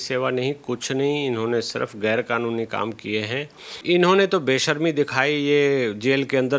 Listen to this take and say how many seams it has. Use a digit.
1